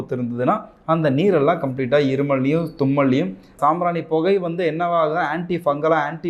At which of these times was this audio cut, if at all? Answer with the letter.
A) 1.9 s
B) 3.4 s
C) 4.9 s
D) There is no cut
B